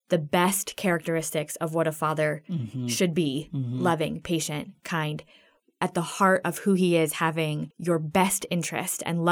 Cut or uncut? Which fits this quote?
cut